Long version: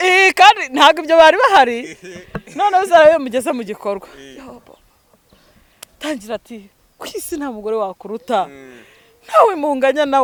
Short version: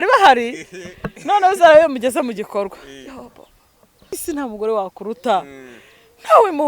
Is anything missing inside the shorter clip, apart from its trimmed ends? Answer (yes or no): yes